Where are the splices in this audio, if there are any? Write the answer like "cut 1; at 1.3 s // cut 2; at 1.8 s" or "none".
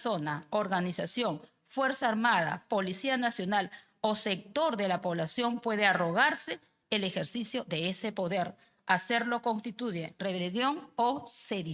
none